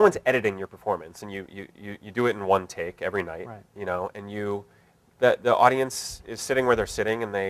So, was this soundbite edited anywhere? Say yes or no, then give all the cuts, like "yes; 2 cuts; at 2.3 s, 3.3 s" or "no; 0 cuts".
yes; 1 cut; at 3.9 s